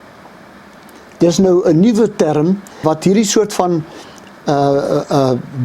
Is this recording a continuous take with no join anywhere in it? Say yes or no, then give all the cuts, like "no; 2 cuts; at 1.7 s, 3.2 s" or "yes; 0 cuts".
no; 1 cut; at 2.8 s